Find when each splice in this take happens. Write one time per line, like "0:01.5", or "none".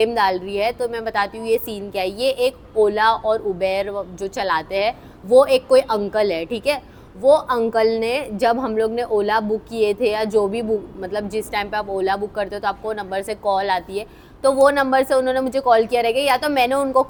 none